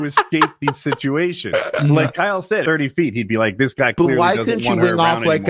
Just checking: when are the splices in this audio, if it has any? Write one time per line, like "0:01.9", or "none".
0:02.6

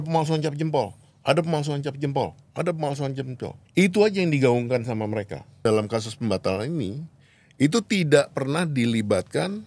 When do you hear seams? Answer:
0:03.6
0:05.6

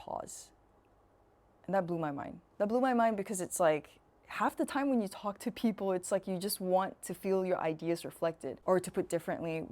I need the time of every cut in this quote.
0:08.5

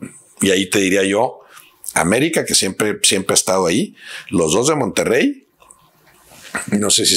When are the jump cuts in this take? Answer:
none

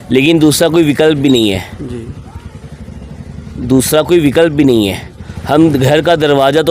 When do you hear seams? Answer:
none

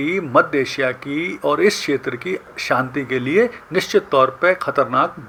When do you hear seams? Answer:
none

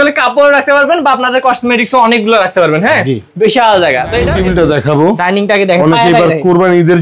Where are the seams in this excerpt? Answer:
0:04.3

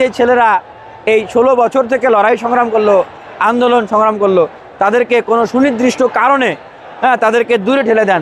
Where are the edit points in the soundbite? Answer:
none

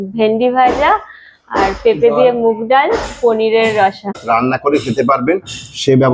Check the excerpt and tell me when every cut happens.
0:04.2

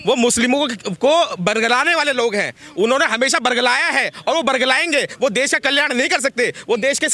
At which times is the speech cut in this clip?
none

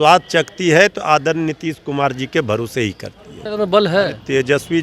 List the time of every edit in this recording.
0:03.4

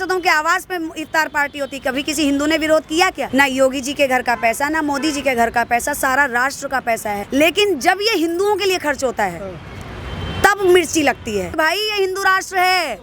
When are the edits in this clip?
0:03.2
0:07.2
0:11.5

